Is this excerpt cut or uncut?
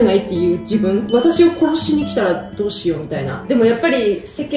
cut